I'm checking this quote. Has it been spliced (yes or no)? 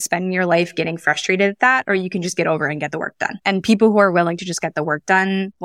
yes